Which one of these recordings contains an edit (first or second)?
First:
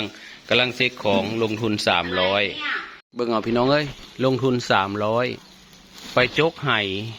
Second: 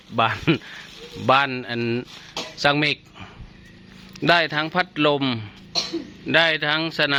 first